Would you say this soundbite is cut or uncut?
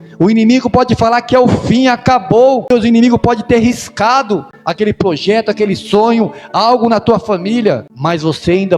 cut